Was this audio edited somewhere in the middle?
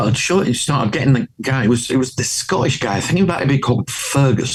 no; 0 cuts

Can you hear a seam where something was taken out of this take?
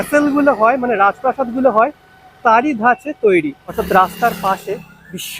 yes; 1 cut; at 3.8 s

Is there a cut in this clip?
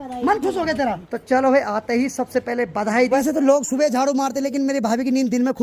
yes; 2 cuts; at 1.0 s, 3.2 s

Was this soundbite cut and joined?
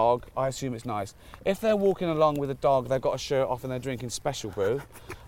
no; 0 cuts

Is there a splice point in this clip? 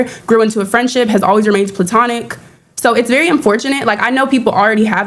no; 0 cuts

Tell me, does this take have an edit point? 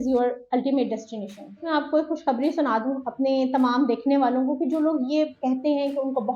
yes; 1 cut; at 1.6 s

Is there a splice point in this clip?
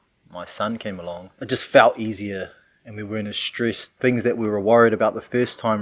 yes; 1 cut; at 1.4 s

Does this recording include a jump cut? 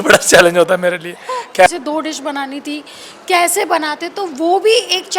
yes; 1 cut; at 1.7 s

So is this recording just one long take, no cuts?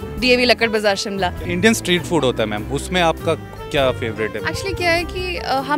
no; 1 cut; at 1.4 s

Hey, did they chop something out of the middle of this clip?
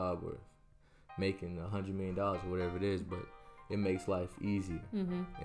no; 0 cuts

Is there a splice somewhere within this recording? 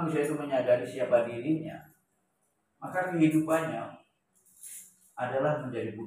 no; 0 cuts

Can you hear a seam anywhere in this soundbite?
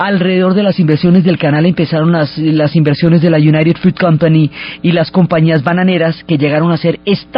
no; 0 cuts

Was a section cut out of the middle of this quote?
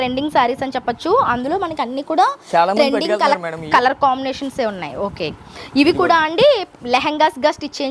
no; 0 cuts

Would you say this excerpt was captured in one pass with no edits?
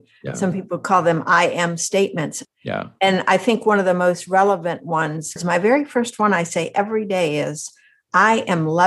no; 2 cuts; at 2.4 s, 5.4 s

